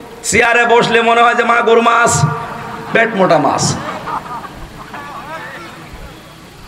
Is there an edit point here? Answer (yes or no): no